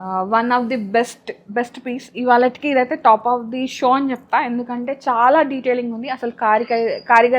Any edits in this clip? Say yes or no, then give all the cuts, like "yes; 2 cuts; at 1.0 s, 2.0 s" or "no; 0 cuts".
no; 0 cuts